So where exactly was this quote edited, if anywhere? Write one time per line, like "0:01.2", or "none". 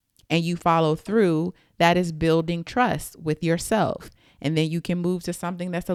none